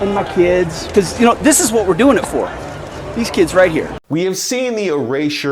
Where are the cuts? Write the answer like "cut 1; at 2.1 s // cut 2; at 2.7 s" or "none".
cut 1; at 4.0 s